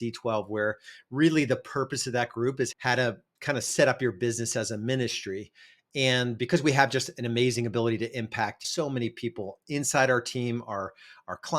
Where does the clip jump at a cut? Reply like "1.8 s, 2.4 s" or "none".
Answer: 2.8 s